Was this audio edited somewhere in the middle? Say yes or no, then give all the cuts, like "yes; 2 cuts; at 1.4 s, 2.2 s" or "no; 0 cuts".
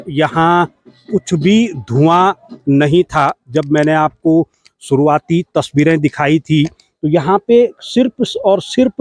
no; 0 cuts